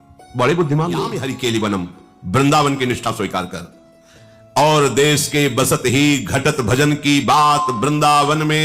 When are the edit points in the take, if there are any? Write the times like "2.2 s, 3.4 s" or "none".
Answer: 1.2 s

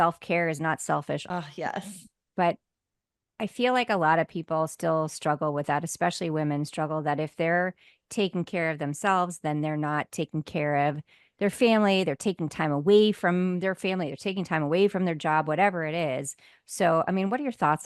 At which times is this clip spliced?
1.2 s

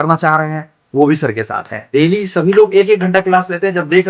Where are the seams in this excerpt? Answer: 1.7 s

